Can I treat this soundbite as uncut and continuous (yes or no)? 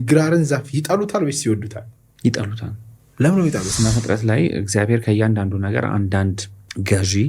no